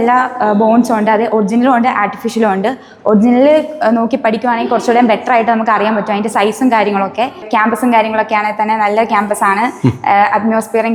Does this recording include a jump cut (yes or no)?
no